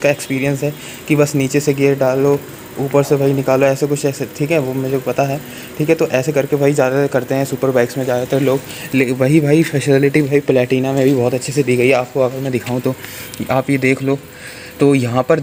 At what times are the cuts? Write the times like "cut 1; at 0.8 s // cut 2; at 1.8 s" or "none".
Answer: none